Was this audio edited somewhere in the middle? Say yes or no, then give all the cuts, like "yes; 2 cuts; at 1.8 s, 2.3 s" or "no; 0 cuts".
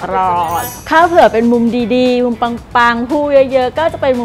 no; 0 cuts